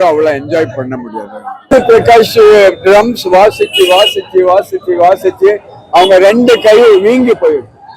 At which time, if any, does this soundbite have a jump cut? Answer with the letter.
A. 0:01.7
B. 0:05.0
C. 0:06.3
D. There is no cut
A